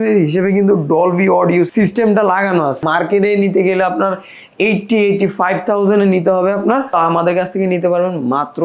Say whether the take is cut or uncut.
cut